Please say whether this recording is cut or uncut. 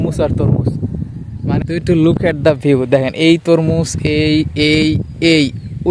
cut